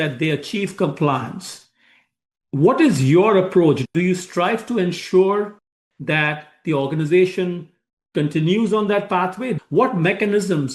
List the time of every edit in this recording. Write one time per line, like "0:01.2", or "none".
0:03.8
0:09.6